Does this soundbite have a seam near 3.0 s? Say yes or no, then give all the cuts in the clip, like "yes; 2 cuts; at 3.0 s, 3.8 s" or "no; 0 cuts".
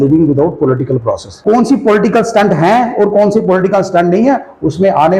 no; 1 cut; at 1.3 s